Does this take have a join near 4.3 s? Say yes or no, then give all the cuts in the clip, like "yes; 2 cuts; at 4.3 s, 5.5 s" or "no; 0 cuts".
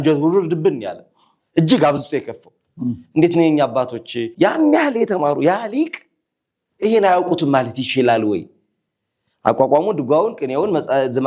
yes; 1 cut; at 4.3 s